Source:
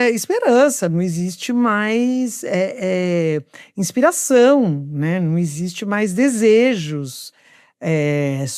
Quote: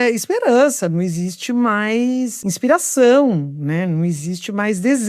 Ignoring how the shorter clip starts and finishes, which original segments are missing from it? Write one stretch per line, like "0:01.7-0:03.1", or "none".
0:02.4-0:03.7